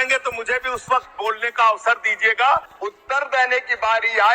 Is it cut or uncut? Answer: cut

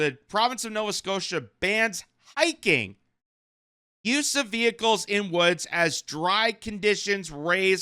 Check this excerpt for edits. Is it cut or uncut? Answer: uncut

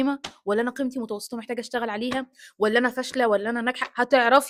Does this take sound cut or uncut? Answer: uncut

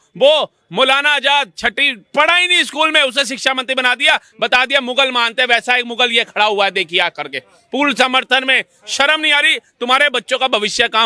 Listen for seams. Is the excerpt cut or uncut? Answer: uncut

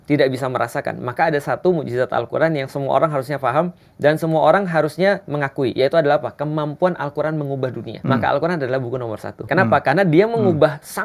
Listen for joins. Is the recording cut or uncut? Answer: cut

